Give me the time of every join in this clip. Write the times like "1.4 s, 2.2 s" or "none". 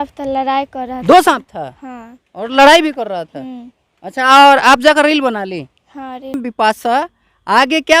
6.4 s